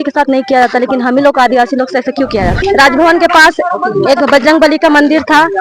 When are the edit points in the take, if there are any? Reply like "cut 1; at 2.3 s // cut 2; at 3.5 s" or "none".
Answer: cut 1; at 2.5 s